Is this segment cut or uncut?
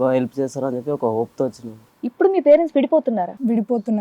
cut